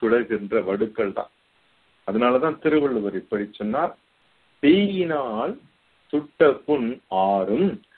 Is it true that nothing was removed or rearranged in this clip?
yes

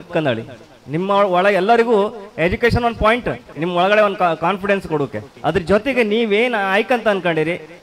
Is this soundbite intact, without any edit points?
no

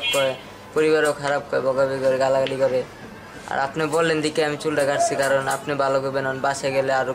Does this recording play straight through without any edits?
yes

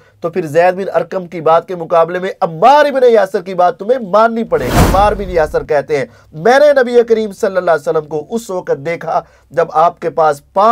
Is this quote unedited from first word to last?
no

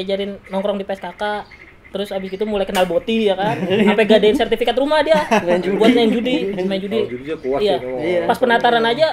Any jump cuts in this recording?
no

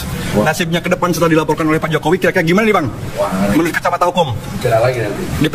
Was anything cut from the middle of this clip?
no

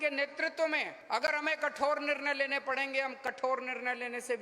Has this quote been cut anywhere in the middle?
yes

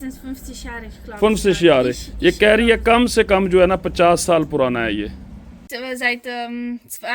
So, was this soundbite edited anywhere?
yes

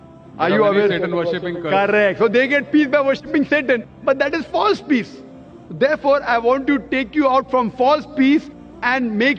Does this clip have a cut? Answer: no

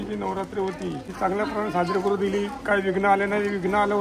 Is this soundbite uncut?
no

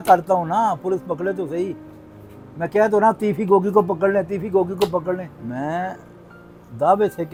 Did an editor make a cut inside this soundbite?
no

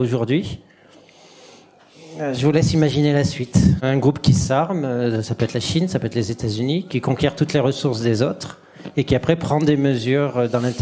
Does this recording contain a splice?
yes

